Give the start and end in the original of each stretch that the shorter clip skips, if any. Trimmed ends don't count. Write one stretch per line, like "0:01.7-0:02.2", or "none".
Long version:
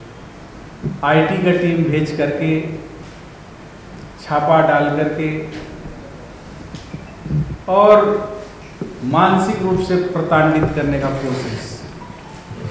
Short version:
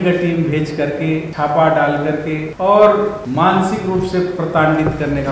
0:02.7-0:04.2
0:05.4-0:07.6
0:08.3-0:09.0